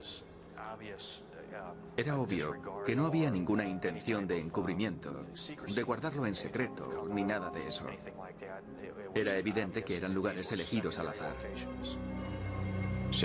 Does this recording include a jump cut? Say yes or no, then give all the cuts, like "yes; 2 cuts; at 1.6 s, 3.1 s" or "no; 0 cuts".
yes; 1 cut; at 10.4 s